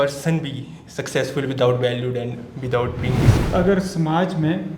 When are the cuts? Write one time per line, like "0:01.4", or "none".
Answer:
0:03.3